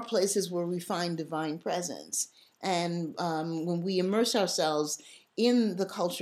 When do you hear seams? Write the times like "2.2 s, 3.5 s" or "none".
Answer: none

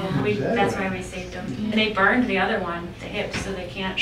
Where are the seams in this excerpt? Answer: 1.7 s

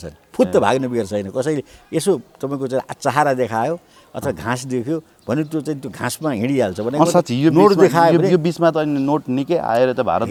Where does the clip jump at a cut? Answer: none

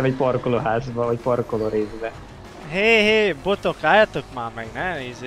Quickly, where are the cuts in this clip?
none

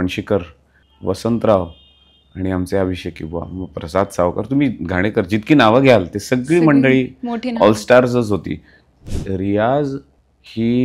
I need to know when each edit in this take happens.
9.0 s

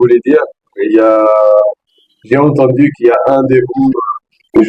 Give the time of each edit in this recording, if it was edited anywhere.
none

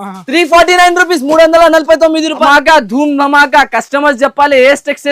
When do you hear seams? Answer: 2.4 s

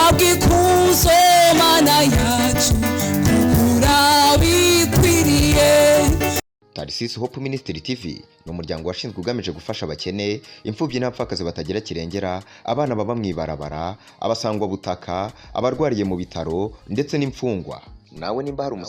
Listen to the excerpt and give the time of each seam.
6.4 s

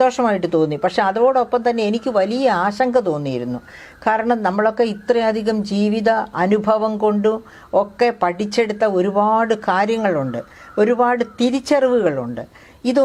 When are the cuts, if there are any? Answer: none

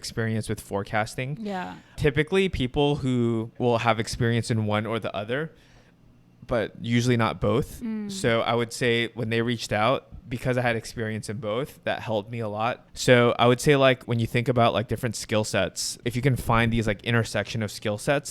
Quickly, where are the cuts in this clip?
3.5 s, 10.1 s, 12.9 s, 14.0 s, 16.0 s

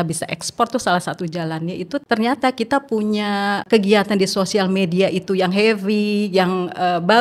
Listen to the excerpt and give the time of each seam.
2.0 s, 3.6 s

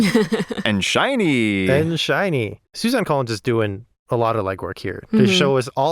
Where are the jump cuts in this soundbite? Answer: 2.6 s

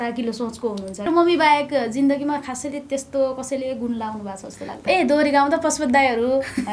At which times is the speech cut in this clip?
1.1 s, 4.8 s

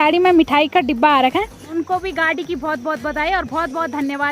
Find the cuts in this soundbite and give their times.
1.6 s

